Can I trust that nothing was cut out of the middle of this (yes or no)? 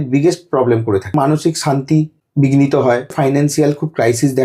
no